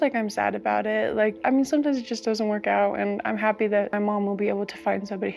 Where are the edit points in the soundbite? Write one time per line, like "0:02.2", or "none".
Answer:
none